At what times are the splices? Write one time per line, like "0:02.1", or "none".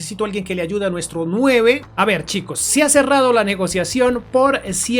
0:01.9